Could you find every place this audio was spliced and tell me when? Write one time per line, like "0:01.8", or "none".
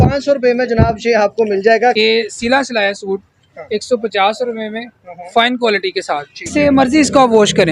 0:02.0
0:06.5